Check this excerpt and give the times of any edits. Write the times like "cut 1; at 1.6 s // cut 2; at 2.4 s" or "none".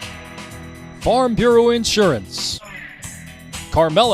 cut 1; at 1.0 s